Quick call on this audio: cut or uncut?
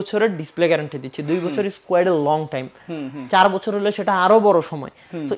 uncut